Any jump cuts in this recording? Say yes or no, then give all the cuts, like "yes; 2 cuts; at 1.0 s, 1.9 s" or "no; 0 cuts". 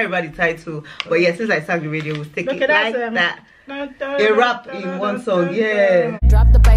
no; 0 cuts